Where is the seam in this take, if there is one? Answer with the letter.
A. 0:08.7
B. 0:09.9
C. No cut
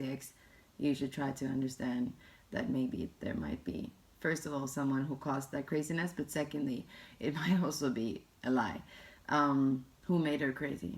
B